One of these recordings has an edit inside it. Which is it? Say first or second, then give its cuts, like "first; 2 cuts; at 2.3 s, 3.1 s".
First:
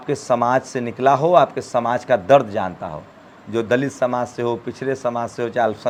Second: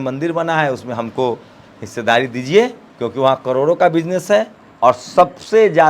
second; 2 cuts; at 2.8 s, 4.6 s